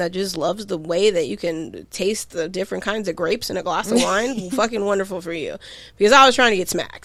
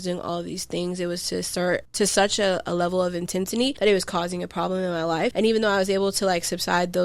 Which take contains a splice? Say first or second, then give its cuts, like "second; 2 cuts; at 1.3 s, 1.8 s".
second; 3 cuts; at 1.9 s, 3.8 s, 5.3 s